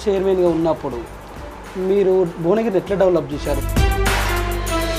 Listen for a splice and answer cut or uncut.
uncut